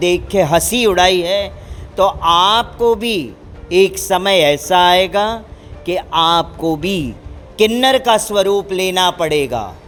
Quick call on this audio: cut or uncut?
uncut